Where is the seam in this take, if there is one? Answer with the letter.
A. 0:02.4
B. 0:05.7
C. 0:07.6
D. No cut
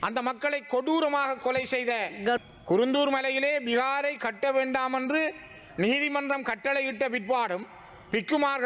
A